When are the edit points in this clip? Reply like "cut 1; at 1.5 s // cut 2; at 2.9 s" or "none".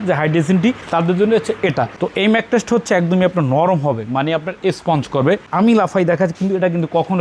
cut 1; at 1.9 s // cut 2; at 5.5 s